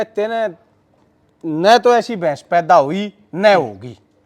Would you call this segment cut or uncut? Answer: uncut